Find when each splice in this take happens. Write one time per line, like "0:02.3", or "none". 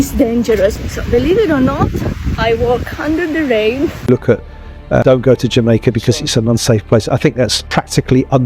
0:04.0